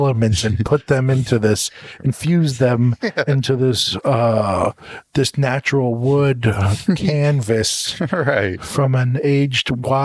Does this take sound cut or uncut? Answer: uncut